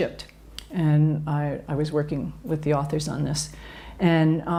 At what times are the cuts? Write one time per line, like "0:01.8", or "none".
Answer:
none